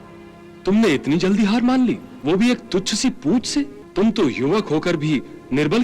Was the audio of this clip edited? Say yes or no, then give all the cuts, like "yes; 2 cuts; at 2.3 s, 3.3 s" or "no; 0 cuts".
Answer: yes; 2 cuts; at 2.1 s, 3.8 s